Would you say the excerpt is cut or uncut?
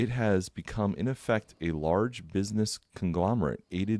uncut